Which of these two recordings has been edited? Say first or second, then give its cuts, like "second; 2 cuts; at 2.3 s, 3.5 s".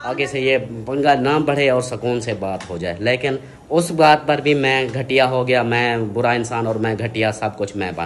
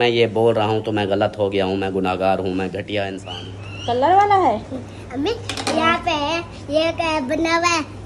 second; 1 cut; at 3.3 s